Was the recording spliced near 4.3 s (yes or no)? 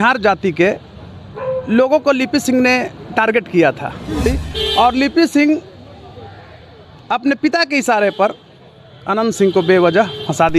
yes